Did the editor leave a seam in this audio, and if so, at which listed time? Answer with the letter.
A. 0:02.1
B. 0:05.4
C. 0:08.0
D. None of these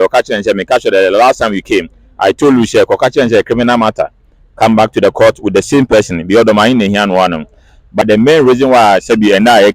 C